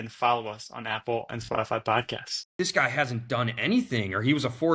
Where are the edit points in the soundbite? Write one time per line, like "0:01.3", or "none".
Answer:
0:02.4

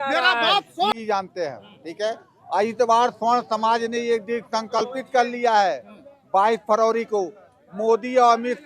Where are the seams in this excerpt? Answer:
0:00.9

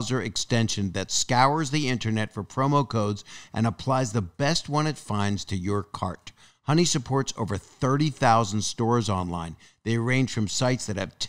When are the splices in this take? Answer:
none

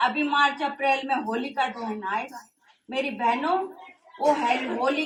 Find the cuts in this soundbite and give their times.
none

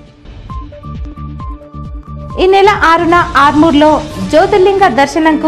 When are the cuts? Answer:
0:01.1

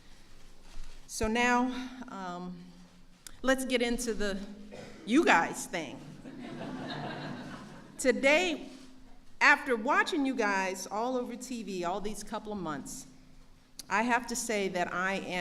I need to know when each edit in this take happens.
0:06.7

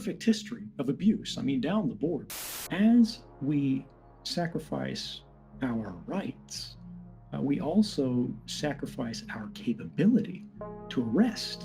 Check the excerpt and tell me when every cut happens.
0:02.3

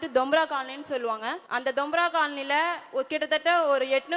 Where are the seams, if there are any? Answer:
0:01.4
0:02.8

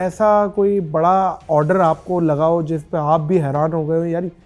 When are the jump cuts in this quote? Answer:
none

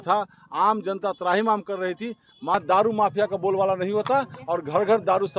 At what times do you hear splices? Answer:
0:02.5

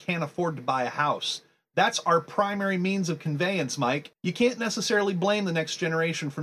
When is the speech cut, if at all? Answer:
0:04.1

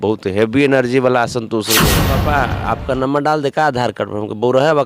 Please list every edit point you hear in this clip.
0:02.1

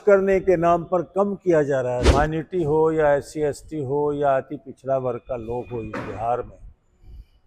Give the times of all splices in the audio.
0:02.0

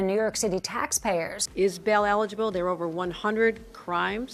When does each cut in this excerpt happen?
0:01.4

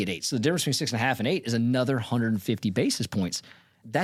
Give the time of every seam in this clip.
none

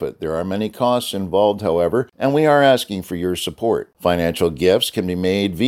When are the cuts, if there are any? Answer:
0:02.1

